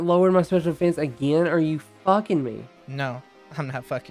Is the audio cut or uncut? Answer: cut